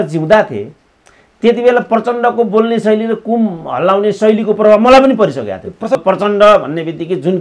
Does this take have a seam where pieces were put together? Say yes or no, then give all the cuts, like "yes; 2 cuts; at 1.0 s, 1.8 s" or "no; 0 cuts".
yes; 1 cut; at 6.0 s